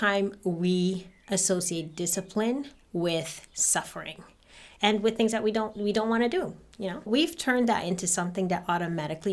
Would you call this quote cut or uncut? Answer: cut